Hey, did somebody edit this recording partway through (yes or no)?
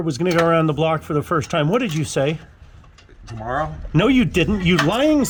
no